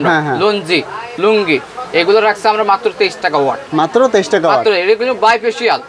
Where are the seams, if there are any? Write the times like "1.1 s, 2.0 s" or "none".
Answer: none